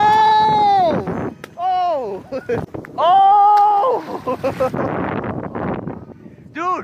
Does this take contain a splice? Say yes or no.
yes